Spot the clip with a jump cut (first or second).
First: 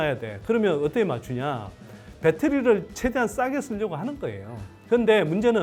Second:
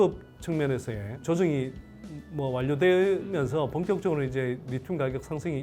second